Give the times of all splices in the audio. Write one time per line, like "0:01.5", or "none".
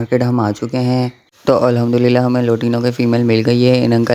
0:01.2